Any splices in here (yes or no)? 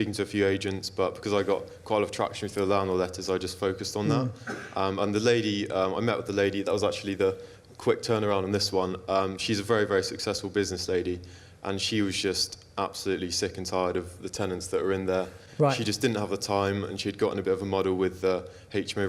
no